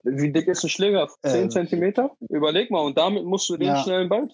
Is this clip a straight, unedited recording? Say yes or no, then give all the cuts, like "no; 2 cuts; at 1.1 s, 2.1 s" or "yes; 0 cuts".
yes; 0 cuts